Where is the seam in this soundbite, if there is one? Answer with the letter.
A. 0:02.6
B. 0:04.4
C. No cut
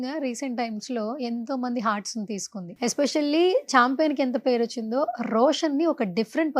A